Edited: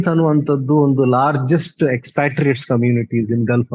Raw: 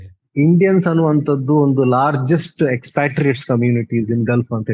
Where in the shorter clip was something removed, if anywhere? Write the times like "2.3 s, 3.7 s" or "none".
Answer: none

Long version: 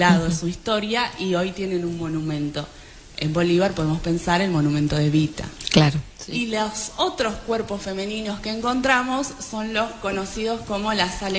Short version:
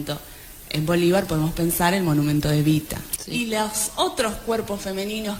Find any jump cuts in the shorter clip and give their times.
3.1 s

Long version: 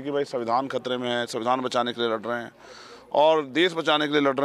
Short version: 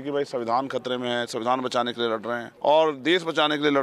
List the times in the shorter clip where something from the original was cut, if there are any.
2.5 s

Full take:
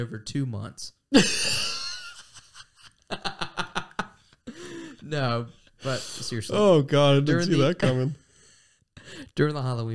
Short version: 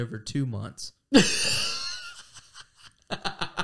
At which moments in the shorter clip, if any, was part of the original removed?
none

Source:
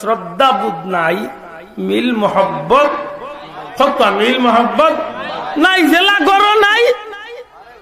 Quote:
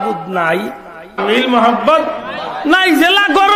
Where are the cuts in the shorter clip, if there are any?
1.2 s

